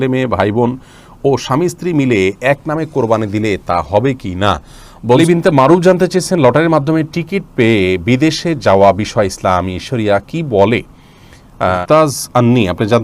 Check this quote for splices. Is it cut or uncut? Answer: cut